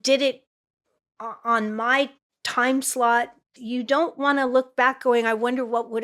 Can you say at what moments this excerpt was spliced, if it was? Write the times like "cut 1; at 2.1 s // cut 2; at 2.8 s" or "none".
cut 1; at 3.6 s